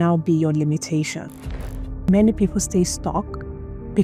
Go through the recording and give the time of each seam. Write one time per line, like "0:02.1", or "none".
0:01.7